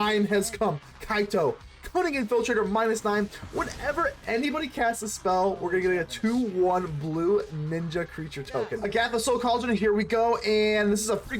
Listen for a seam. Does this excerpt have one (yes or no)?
yes